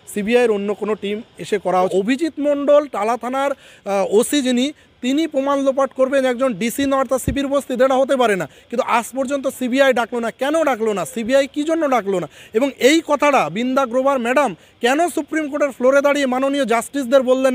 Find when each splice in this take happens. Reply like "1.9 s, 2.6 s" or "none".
1.9 s